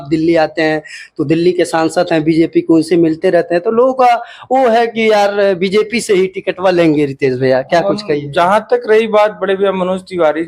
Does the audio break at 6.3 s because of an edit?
no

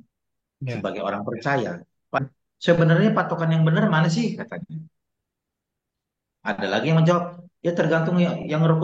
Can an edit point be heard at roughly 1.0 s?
no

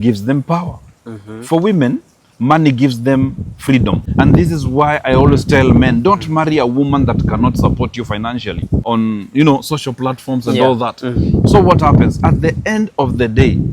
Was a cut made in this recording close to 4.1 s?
yes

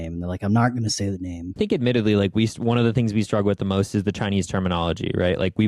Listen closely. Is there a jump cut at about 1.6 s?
yes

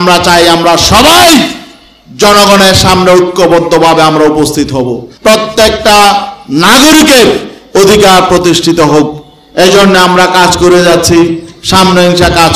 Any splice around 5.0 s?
yes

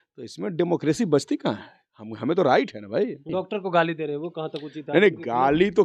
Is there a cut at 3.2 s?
yes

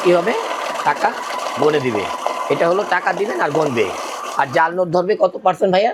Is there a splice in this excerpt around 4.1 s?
no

